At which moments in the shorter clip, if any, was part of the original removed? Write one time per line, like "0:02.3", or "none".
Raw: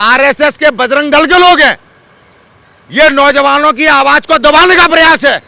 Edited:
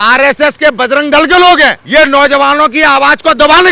0:01.8